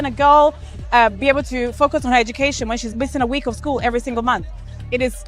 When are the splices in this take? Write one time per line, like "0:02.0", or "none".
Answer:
0:02.9

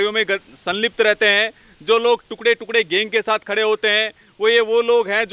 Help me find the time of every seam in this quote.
none

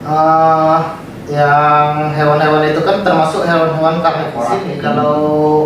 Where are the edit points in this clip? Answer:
0:04.7

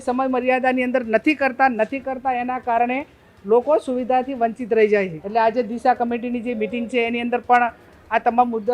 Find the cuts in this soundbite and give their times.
0:05.2

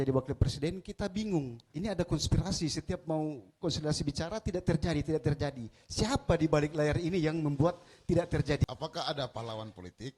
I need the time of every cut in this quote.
0:01.6
0:08.6

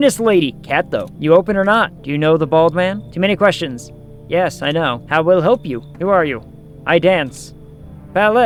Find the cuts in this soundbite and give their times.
none

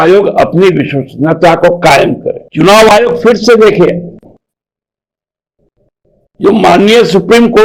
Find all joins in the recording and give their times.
0:02.4

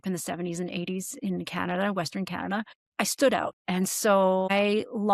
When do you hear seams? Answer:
0:02.9
0:03.6

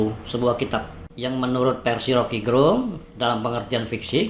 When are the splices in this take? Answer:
0:01.0

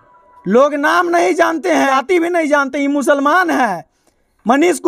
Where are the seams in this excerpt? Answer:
0:01.9

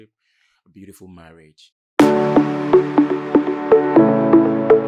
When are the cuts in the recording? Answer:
0:01.8

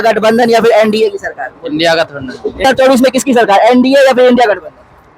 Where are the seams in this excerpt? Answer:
0:02.7

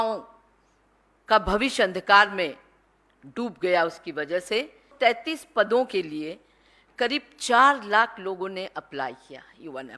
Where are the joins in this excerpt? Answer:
0:04.9

